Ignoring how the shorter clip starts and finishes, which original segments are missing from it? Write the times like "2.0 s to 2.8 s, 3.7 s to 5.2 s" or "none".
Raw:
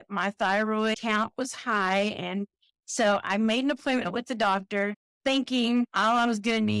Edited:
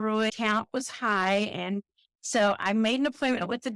none